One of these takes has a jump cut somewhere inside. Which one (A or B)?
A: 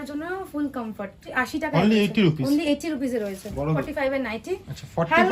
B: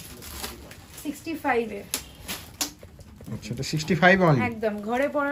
A